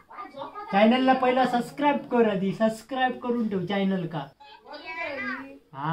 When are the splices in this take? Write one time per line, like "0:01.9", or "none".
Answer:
0:04.4